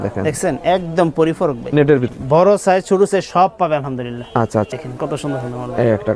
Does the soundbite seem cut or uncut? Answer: cut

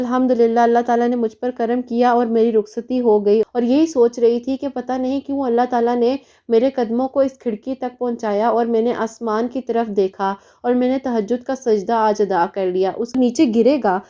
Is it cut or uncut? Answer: cut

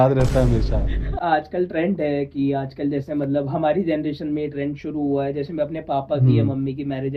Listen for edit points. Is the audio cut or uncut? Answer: cut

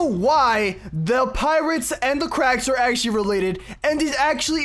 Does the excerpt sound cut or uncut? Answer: uncut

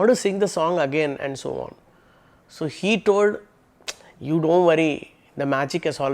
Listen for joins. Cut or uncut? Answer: uncut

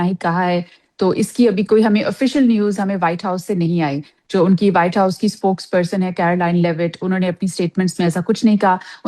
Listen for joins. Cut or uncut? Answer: uncut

